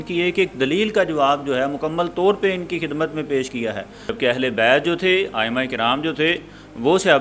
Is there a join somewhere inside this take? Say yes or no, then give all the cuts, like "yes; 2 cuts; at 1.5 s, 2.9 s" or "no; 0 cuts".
yes; 1 cut; at 4.1 s